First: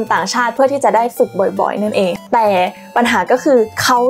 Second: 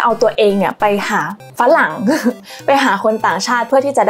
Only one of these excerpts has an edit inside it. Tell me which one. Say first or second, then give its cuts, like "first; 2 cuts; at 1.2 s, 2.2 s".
first; 1 cut; at 2.2 s